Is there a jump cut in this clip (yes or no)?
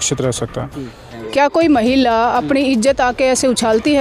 yes